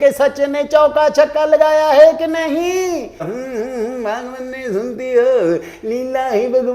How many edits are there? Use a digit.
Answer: 1